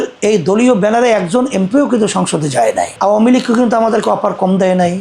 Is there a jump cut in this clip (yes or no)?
yes